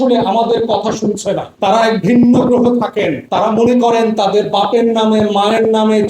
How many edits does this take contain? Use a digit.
2